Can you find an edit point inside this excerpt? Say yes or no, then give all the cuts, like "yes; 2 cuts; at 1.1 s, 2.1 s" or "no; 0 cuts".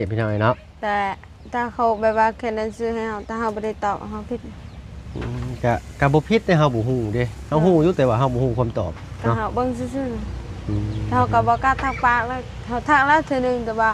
no; 0 cuts